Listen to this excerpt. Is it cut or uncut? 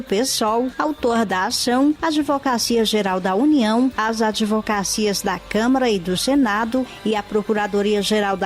uncut